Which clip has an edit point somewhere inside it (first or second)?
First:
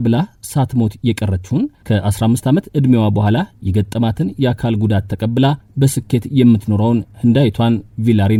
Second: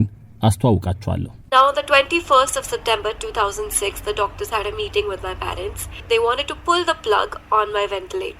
second